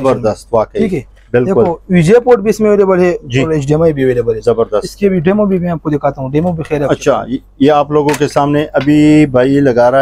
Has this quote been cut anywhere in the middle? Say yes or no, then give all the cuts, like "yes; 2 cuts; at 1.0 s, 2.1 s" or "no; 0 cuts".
no; 0 cuts